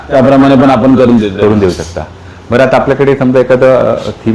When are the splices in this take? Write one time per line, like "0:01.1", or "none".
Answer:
none